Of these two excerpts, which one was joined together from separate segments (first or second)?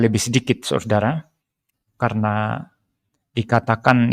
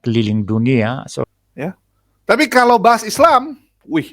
second